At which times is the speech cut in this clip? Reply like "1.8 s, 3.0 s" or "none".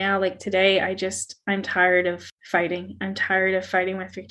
2.3 s